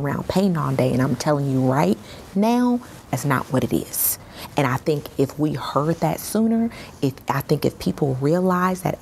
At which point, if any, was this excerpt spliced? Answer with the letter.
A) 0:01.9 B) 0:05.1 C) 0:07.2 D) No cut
D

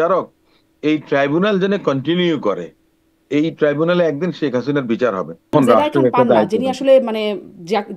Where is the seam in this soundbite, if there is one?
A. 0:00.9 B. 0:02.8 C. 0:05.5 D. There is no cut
C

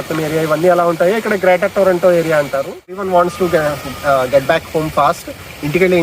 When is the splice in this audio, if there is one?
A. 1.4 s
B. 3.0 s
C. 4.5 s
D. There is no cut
B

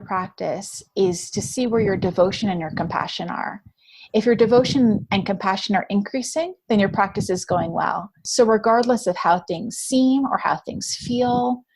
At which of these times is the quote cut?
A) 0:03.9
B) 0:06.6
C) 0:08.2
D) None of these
C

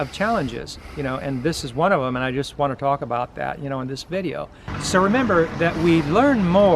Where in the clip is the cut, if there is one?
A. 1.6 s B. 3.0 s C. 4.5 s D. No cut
C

